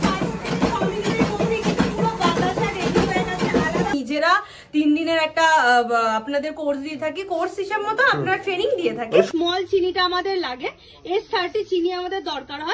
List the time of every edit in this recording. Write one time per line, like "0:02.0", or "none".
0:04.0
0:09.3